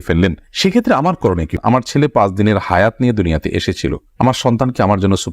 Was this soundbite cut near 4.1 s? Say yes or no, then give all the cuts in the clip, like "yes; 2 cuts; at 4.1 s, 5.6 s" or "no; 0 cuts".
no; 1 cut; at 1.5 s